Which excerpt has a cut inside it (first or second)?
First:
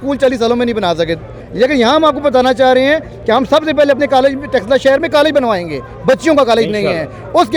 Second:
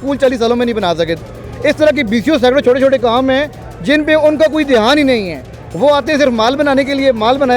first